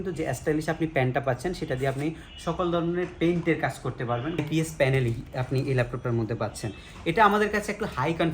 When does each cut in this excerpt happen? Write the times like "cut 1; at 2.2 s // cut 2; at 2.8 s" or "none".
cut 1; at 4.4 s

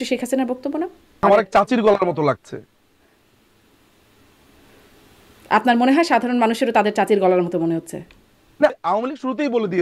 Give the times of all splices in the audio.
cut 1; at 1.2 s // cut 2; at 8.7 s

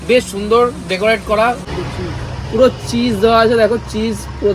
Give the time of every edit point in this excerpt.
cut 1; at 1.7 s

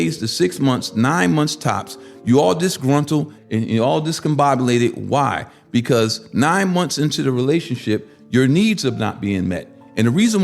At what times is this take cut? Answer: cut 1; at 3.4 s

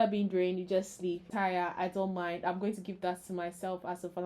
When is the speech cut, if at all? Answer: cut 1; at 1.2 s

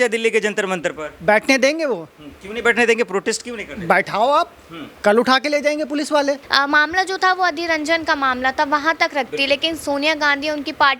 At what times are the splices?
cut 1; at 6.4 s

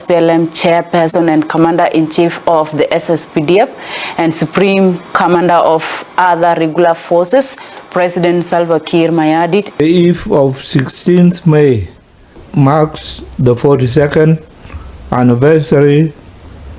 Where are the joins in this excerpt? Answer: cut 1; at 9.7 s

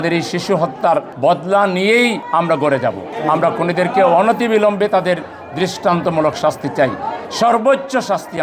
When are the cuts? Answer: none

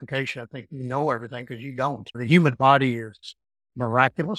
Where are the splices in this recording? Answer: cut 1; at 2.1 s

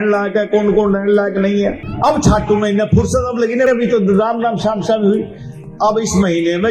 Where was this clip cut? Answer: cut 1; at 1.9 s

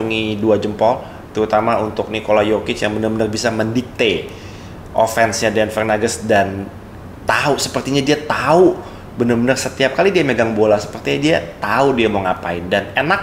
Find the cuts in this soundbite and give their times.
none

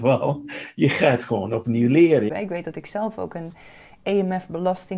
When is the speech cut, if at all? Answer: cut 1; at 2.3 s

